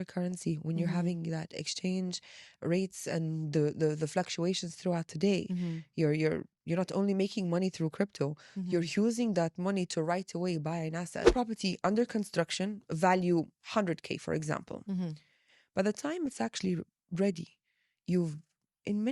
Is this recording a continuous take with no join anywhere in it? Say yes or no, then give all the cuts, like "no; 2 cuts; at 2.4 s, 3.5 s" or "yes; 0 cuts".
no; 1 cut; at 11.3 s